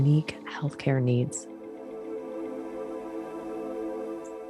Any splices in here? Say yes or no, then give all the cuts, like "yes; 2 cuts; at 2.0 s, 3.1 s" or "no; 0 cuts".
yes; 1 cut; at 1.4 s